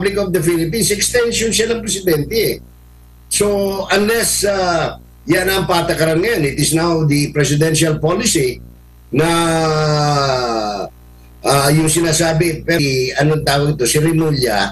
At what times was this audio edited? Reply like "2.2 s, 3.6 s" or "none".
12.8 s